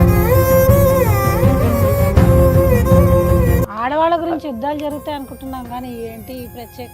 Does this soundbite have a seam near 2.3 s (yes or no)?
no